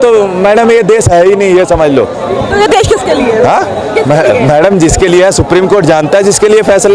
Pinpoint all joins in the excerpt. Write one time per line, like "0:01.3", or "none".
none